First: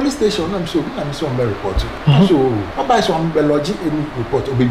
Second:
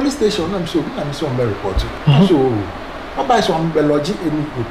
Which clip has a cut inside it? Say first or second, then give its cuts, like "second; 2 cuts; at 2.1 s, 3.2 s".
first; 1 cut; at 2.7 s